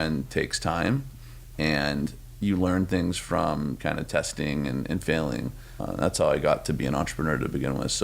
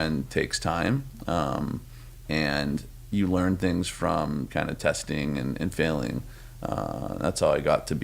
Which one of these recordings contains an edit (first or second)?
first